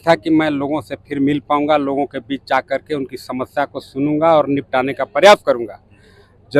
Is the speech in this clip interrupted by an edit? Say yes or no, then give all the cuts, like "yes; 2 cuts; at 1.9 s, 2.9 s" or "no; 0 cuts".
no; 0 cuts